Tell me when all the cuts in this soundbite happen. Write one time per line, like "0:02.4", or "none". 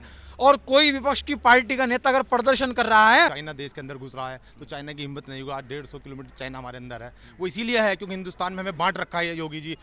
0:03.5